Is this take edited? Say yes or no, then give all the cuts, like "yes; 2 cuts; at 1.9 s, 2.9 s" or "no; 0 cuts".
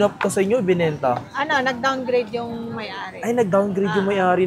no; 0 cuts